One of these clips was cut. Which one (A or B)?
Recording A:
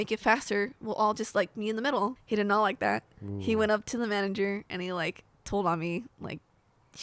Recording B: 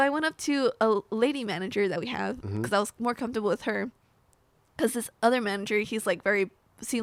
A